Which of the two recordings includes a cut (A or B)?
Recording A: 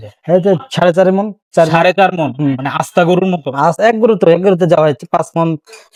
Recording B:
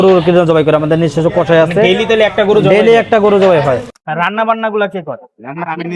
B